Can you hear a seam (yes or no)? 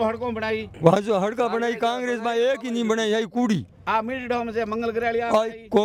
no